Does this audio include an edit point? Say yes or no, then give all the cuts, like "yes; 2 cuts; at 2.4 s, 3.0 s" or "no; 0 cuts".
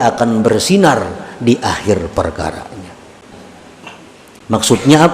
yes; 1 cut; at 3.3 s